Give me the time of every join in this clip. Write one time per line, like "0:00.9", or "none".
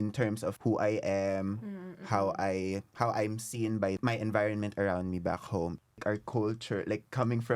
0:02.9
0:04.0
0:05.8